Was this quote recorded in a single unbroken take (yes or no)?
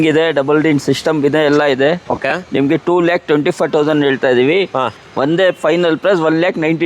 yes